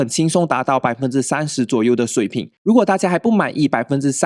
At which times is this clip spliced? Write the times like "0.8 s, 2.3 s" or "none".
2.5 s